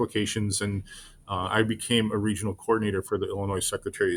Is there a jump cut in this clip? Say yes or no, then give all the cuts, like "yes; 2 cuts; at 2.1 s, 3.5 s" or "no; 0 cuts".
no; 0 cuts